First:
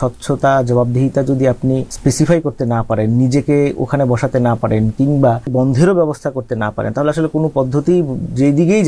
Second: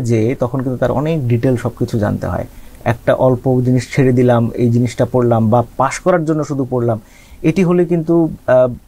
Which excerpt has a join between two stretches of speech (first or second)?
first